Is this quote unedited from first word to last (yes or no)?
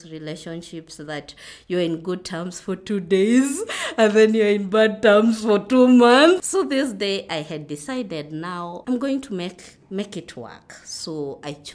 yes